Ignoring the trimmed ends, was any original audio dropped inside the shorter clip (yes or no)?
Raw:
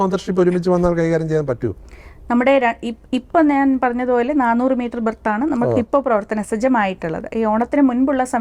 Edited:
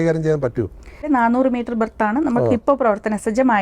yes